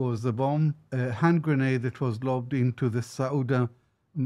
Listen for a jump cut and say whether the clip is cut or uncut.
uncut